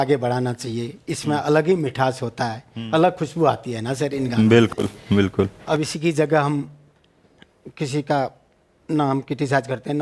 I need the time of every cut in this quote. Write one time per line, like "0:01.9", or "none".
none